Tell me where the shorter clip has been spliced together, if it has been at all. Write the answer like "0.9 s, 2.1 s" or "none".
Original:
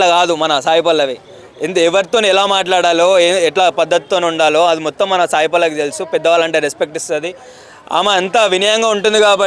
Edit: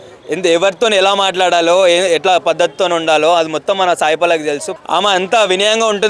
4.7 s